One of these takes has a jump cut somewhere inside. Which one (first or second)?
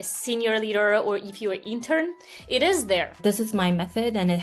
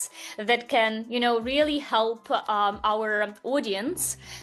first